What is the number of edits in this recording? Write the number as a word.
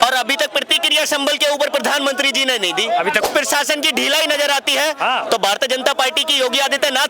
one